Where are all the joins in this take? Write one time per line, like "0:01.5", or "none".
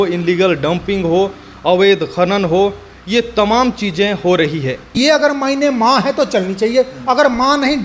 0:05.0